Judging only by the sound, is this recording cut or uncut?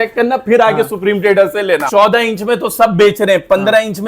cut